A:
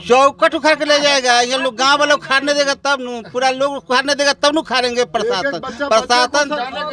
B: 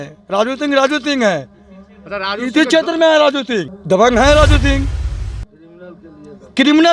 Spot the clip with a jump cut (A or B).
B